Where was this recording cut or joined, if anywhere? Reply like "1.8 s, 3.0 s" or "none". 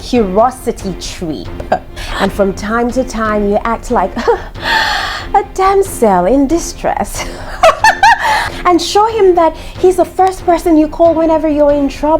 2.0 s, 8.5 s